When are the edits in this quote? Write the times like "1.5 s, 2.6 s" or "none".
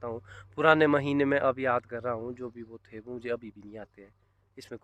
none